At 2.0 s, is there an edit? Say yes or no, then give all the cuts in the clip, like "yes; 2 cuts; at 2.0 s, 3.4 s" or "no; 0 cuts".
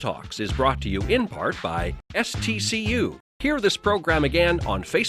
yes; 2 cuts; at 2.0 s, 3.4 s